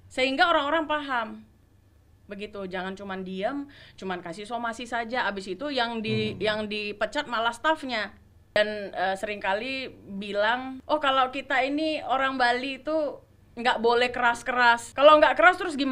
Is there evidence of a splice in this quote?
yes; 3 cuts; at 8.6 s, 10.7 s, 14.9 s

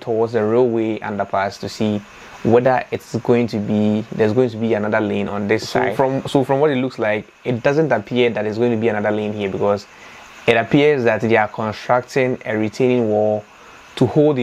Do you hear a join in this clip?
yes; 1 cut; at 5.9 s

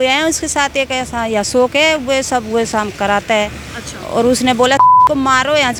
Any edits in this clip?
no; 0 cuts

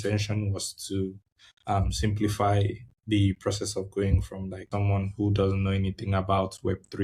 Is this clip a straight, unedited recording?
no; 1 cut; at 4.7 s

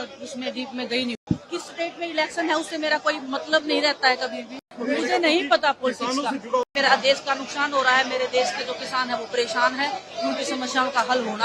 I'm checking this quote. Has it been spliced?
yes; 3 cuts; at 1.2 s, 4.7 s, 6.6 s

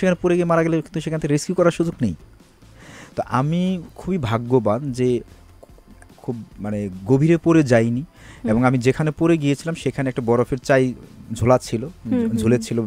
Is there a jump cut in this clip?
no; 0 cuts

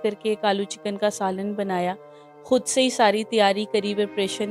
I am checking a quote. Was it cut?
no; 0 cuts

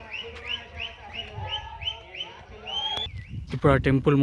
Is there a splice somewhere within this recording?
yes; 1 cut; at 3.2 s

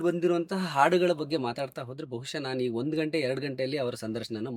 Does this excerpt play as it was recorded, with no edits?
yes; 0 cuts

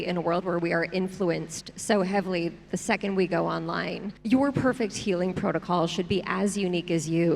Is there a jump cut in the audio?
yes; 1 cut; at 4.1 s

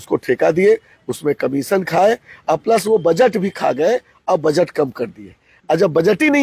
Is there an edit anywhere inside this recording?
no; 0 cuts

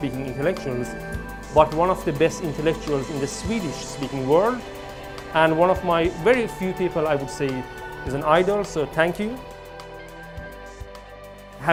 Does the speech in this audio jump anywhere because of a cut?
no; 0 cuts

